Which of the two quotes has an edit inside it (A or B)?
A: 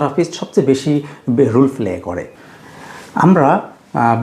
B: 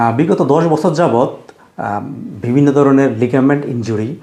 A